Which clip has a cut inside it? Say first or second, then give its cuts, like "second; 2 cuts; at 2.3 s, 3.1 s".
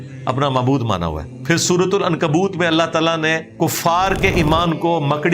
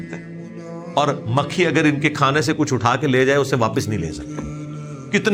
first; 2 cuts; at 1.3 s, 3.5 s